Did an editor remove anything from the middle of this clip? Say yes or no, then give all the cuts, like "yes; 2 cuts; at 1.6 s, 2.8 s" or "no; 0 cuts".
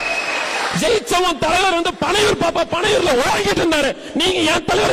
no; 0 cuts